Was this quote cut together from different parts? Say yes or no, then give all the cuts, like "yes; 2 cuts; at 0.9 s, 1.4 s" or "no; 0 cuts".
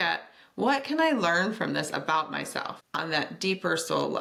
no; 0 cuts